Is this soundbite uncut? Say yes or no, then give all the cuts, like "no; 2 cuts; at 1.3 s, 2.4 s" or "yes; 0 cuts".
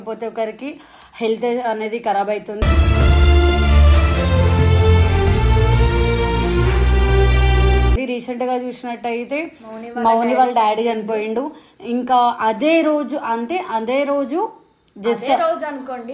yes; 0 cuts